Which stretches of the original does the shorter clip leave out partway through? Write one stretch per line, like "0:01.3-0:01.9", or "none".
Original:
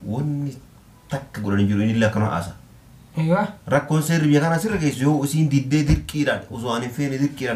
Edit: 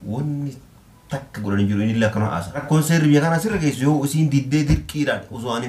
0:02.6-0:03.8